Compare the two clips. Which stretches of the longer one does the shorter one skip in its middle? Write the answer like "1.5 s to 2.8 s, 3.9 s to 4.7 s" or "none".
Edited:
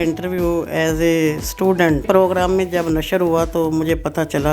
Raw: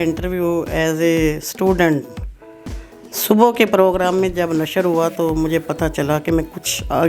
2.0 s to 3.7 s

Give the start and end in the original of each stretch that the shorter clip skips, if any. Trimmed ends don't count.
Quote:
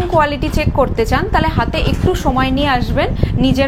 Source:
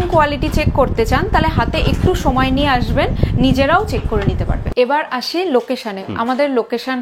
none

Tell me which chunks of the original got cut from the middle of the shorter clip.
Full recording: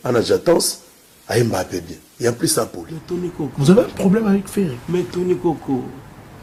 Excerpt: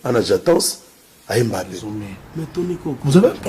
2.2 s to 2.7 s

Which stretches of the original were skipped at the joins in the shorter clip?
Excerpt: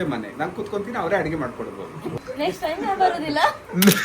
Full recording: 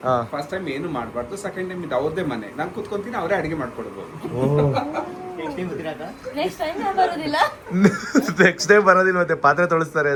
4.3 s to 6.1 s

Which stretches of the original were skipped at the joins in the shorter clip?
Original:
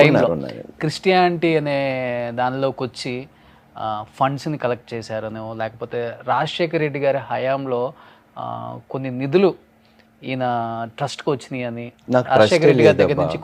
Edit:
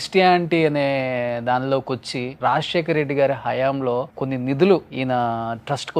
3.2 s to 6.2 s, 8.0 s to 8.9 s, 9.6 s to 10.2 s

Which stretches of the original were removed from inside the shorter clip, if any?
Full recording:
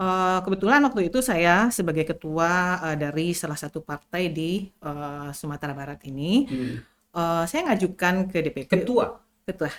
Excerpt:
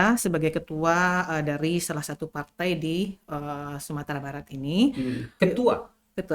6.8 s to 8.6 s

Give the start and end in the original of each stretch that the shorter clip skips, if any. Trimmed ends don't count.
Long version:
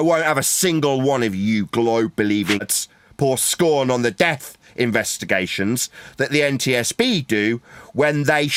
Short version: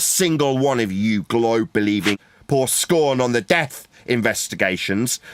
2.7 s to 3.0 s

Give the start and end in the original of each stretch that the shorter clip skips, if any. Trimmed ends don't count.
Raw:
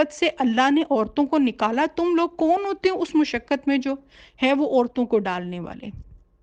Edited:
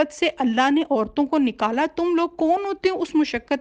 none

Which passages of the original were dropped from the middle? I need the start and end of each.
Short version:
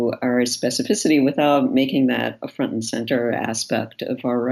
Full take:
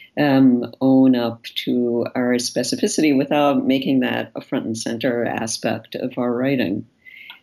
none

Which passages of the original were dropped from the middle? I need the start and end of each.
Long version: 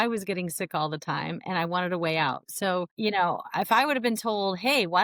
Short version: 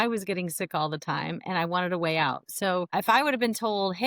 2.9 s to 3.5 s

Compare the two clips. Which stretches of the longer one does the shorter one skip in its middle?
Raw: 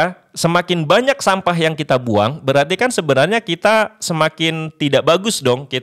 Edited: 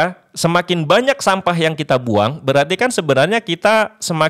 none

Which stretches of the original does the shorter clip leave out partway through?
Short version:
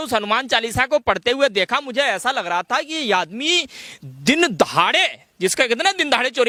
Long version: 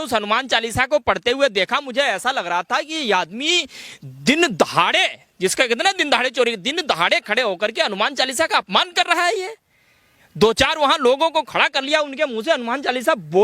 none

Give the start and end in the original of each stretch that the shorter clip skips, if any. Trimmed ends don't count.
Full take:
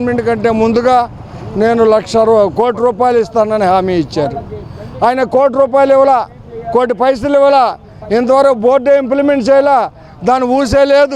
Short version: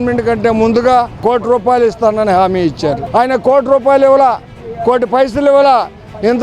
1.2 s to 2.5 s, 4.4 s to 4.9 s

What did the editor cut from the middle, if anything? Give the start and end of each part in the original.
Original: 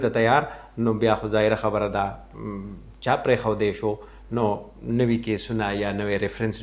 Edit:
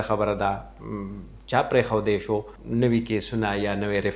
4.1 s to 4.7 s

